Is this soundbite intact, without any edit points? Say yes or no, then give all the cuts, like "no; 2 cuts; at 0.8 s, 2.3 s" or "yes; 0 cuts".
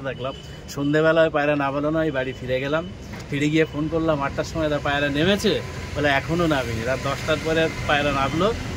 yes; 0 cuts